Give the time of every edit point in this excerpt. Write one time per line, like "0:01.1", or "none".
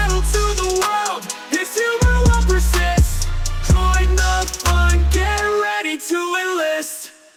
none